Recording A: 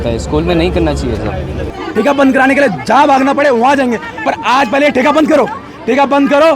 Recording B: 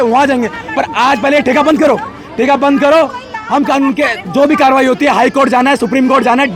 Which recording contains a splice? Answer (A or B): A